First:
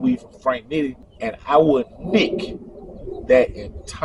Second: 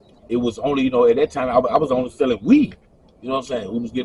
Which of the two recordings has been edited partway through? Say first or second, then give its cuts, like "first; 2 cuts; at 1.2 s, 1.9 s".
first; 1 cut; at 1.1 s